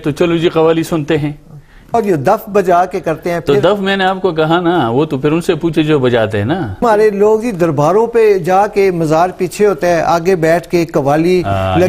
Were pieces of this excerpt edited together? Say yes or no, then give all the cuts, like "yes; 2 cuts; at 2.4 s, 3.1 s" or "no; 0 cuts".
yes; 2 cuts; at 1.9 s, 6.8 s